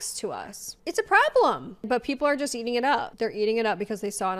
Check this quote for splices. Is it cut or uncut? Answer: cut